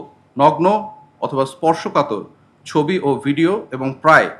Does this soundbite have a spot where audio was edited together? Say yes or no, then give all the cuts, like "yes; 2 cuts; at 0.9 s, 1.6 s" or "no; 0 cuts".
no; 0 cuts